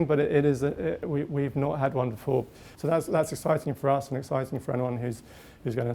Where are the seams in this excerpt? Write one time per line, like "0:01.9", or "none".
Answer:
0:02.6

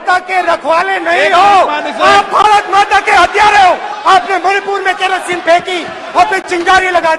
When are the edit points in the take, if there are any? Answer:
0:03.9

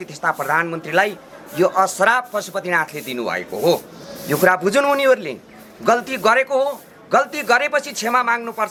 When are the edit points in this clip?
none

